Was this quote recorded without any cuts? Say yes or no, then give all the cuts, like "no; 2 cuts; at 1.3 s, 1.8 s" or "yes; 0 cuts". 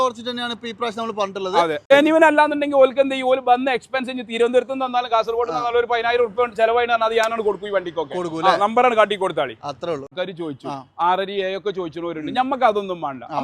no; 2 cuts; at 1.9 s, 10.1 s